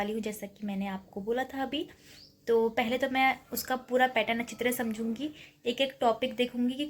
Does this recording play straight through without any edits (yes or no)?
yes